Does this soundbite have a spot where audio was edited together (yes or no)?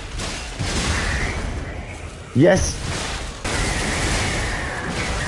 yes